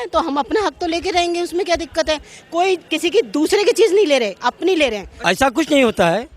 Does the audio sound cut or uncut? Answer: cut